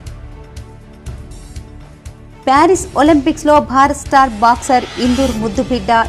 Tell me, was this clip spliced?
no; 0 cuts

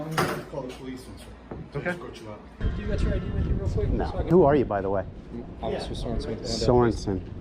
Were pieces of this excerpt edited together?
yes; 2 cuts; at 2.6 s, 4.3 s

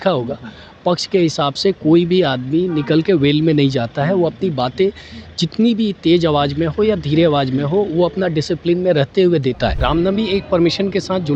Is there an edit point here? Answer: yes; 1 cut; at 9.8 s

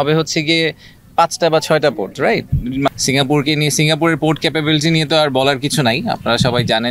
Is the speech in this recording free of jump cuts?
no; 1 cut; at 2.9 s

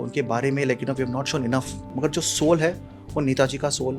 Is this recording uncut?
no; 1 cut; at 1.8 s

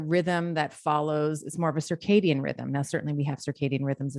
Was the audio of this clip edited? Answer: no; 0 cuts

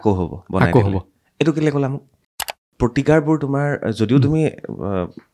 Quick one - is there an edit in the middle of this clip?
yes; 1 cut; at 2.6 s

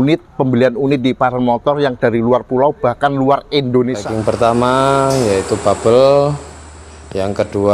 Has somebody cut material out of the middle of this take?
yes; 1 cut; at 4.0 s

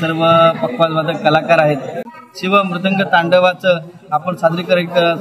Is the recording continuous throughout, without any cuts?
no; 1 cut; at 2.1 s

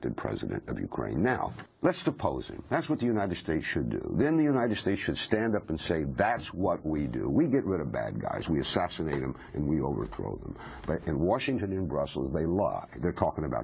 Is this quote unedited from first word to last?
no; 1 cut; at 1.6 s

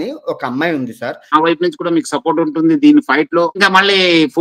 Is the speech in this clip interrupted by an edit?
yes; 2 cuts; at 1.3 s, 3.6 s

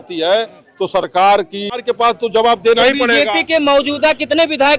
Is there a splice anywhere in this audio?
yes; 1 cut; at 1.9 s

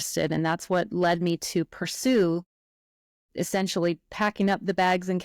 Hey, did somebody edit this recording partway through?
no; 0 cuts

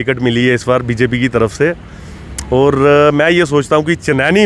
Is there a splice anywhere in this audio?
no; 0 cuts

